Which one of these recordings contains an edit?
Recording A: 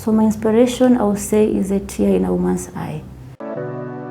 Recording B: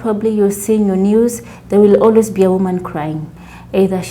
A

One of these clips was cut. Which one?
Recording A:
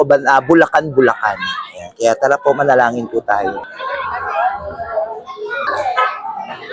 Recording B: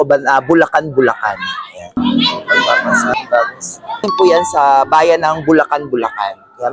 B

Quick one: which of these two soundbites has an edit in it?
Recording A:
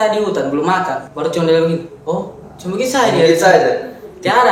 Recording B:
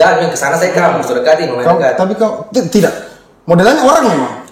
A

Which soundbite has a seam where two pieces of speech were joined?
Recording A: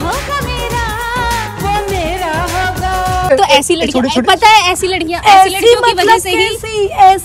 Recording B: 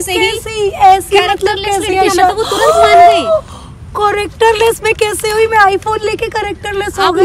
A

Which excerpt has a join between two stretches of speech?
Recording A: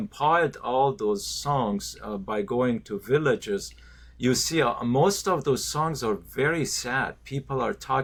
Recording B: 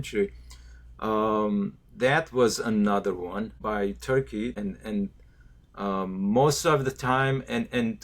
B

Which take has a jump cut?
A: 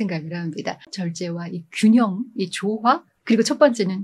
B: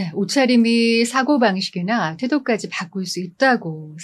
A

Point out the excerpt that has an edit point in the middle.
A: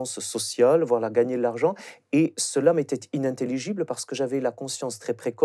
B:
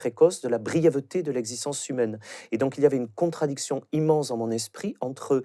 A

